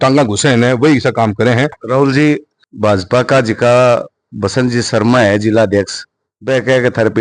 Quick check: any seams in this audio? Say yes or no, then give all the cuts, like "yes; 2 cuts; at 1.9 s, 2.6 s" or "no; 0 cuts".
yes; 1 cut; at 1.8 s